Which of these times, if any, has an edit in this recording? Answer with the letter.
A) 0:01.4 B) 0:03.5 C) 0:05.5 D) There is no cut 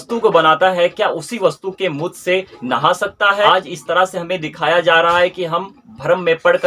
B